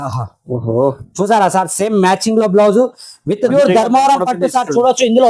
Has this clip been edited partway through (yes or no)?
yes